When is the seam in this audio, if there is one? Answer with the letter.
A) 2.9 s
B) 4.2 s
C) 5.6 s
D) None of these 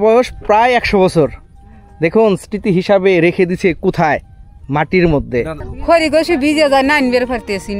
C